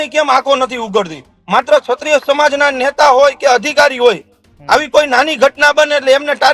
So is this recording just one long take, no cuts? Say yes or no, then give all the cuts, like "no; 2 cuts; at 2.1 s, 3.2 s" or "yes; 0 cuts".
yes; 0 cuts